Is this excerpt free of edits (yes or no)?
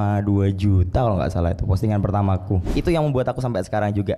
no